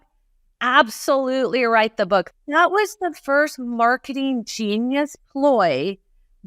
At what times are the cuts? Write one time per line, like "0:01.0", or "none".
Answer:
0:02.3